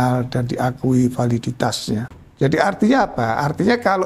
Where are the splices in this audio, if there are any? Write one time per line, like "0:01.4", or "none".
0:02.2